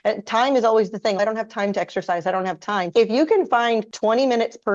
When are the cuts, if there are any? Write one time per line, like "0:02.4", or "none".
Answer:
0:02.9
0:03.9